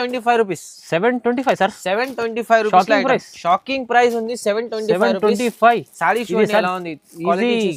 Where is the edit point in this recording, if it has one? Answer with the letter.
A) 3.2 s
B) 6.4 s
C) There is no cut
C